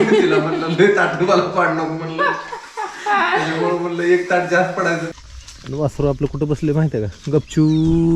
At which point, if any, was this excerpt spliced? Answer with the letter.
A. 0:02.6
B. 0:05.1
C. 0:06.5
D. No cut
B